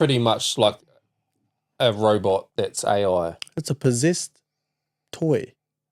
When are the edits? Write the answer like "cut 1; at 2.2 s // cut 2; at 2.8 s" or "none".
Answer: none

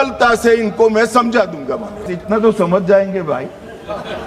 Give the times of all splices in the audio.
cut 1; at 2.1 s

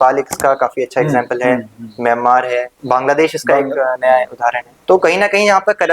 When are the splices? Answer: cut 1; at 2.7 s // cut 2; at 4.7 s

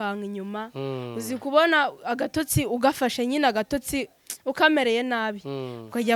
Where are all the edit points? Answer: none

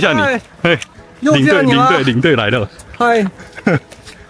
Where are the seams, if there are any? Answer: none

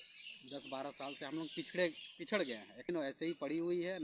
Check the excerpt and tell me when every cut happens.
cut 1; at 2.9 s

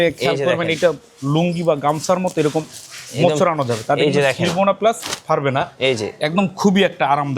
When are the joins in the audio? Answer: none

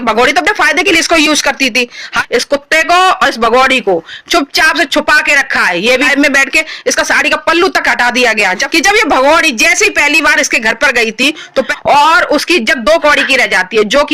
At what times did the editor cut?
cut 1; at 2.1 s // cut 2; at 6.1 s // cut 3; at 8.6 s // cut 4; at 11.7 s

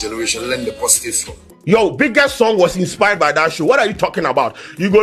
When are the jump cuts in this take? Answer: cut 1; at 1.9 s

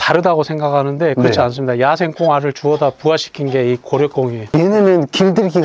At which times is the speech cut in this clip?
none

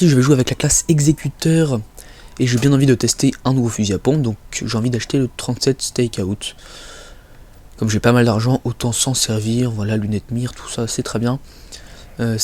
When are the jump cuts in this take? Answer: none

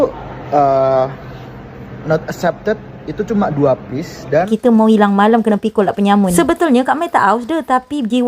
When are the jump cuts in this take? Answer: cut 1; at 4.5 s

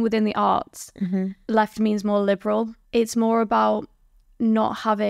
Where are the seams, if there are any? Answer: cut 1; at 1.4 s // cut 2; at 2.8 s

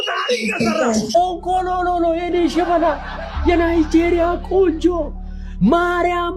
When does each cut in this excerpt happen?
none

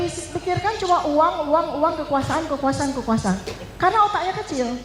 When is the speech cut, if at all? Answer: none

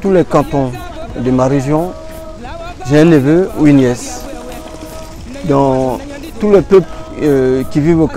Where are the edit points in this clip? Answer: cut 1; at 7.1 s

